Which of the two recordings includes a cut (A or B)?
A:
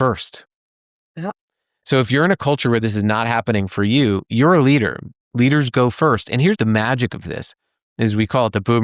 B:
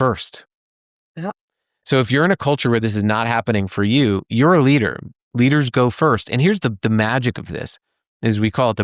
A